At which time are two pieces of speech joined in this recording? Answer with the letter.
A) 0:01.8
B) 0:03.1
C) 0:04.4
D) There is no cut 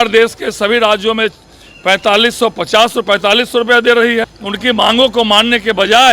C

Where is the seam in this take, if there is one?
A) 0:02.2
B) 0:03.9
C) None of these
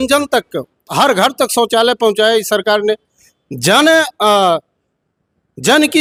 C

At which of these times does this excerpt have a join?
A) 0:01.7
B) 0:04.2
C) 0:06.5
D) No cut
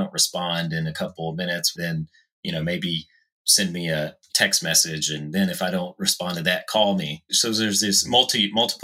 A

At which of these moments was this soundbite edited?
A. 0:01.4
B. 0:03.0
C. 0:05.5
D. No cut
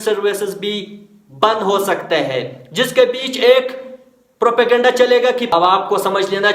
C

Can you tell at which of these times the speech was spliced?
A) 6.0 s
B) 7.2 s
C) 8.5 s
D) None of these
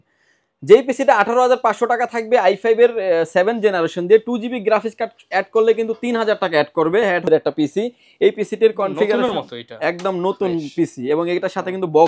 B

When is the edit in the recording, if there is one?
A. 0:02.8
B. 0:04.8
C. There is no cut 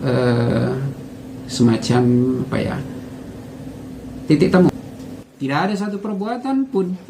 B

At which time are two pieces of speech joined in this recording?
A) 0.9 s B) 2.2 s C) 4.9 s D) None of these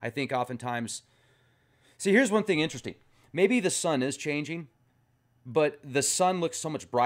B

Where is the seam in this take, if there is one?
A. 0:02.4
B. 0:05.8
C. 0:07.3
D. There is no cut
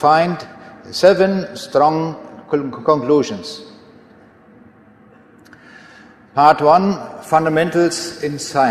D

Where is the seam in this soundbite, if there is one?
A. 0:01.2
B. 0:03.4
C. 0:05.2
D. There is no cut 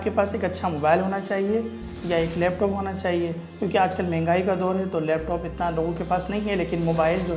D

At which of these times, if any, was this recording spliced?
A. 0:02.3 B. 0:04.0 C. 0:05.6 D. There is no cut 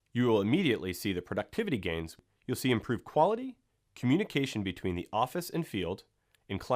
A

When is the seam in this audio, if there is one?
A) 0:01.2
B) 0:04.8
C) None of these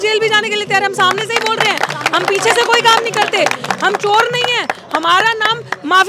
C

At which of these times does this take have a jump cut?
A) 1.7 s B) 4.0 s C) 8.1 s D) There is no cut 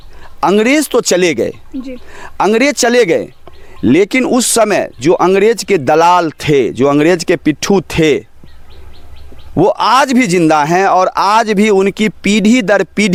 D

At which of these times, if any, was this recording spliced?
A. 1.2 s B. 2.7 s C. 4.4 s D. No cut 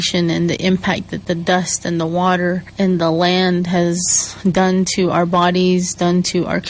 B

